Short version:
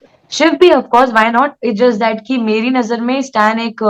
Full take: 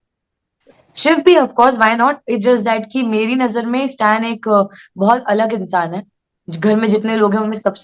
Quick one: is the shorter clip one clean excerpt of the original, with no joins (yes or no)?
yes